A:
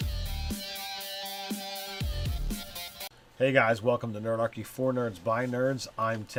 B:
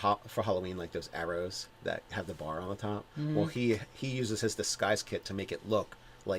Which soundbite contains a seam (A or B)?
B